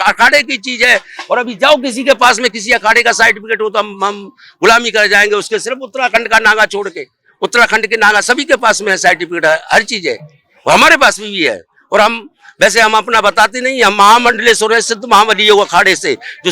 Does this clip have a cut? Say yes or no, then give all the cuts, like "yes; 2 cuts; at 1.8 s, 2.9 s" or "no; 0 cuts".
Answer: no; 0 cuts